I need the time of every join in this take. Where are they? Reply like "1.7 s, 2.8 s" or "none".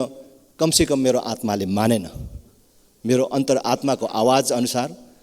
none